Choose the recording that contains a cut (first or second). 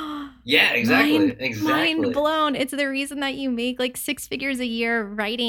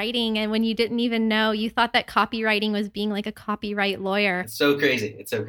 second